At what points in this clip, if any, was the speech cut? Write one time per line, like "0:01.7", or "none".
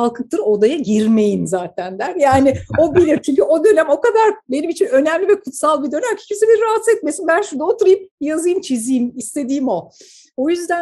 none